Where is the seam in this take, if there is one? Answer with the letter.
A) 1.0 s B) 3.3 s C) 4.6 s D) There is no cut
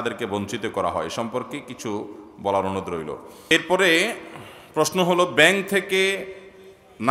B